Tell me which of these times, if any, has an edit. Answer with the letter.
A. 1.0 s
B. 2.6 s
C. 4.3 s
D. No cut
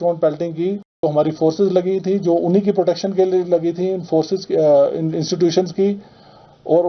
A